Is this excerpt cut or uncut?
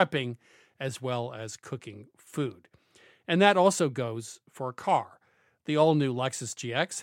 uncut